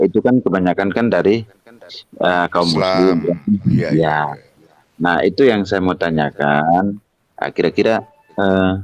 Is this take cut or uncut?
uncut